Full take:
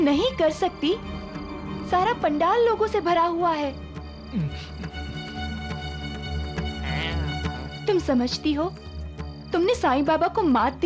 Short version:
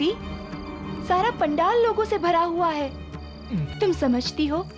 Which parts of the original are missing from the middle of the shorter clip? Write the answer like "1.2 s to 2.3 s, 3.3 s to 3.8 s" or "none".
4.5 s to 7.8 s